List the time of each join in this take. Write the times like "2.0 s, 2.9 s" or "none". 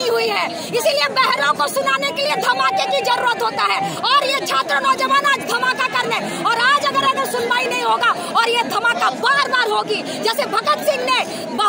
none